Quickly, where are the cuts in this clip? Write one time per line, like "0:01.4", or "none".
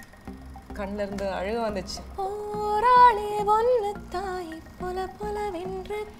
0:02.0